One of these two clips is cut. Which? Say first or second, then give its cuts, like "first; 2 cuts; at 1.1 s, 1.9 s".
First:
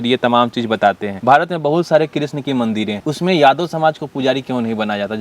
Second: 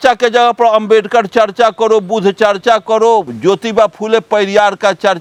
first; 2 cuts; at 1.1 s, 3.0 s